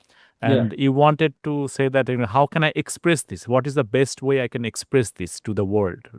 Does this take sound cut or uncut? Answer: uncut